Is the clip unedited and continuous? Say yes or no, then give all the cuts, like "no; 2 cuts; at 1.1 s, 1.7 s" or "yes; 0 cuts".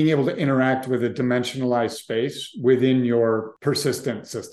no; 1 cut; at 3.5 s